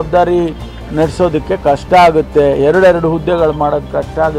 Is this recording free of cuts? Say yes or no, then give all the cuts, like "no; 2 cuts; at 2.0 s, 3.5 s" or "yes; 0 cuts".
yes; 0 cuts